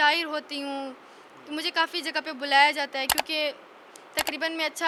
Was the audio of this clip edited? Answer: no; 0 cuts

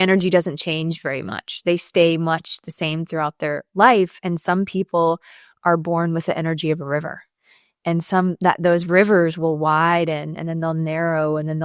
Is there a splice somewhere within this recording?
no; 0 cuts

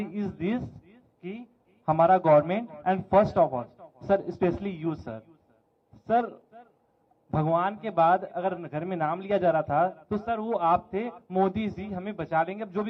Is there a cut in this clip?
no; 0 cuts

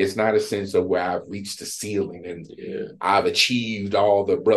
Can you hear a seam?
no; 0 cuts

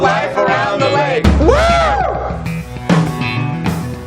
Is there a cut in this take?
no; 0 cuts

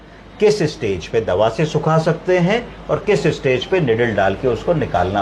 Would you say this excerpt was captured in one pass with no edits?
yes; 0 cuts

